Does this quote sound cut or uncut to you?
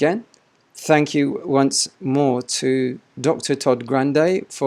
uncut